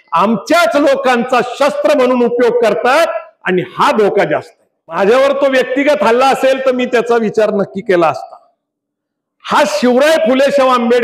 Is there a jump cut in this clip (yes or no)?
yes